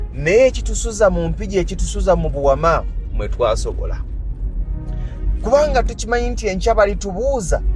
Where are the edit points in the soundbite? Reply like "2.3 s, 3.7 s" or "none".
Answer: none